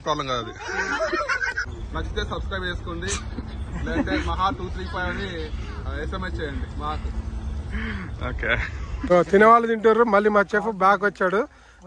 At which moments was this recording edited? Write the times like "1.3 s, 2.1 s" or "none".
1.7 s, 9.1 s